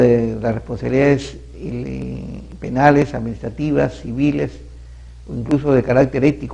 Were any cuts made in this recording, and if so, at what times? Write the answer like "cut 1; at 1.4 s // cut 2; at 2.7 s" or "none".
cut 1; at 4.0 s